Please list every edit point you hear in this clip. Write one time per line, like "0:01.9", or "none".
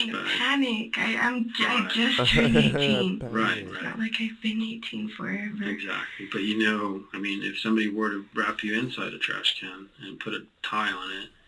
0:03.1